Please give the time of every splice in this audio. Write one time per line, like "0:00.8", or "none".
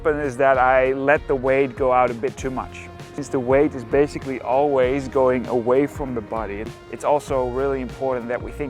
0:03.1
0:06.7